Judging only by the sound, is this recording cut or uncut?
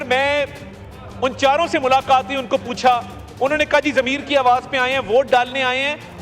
uncut